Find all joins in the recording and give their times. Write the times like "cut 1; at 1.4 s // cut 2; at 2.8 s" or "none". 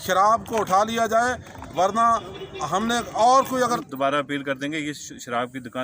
cut 1; at 3.8 s